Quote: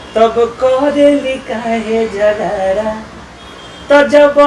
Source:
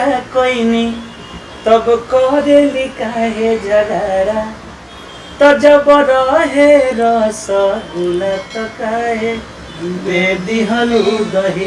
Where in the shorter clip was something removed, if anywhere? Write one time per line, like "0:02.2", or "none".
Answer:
none